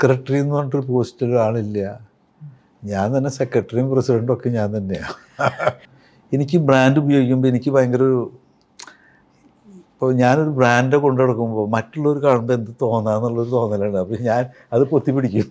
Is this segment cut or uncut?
cut